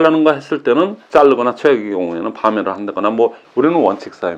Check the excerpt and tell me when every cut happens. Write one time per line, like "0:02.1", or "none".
0:01.0
0:03.4